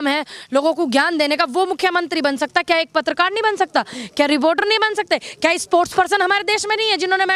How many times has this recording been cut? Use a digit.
0